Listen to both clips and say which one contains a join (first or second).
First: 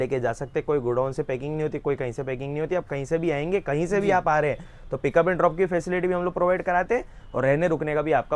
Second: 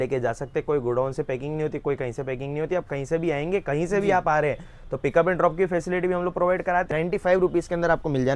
second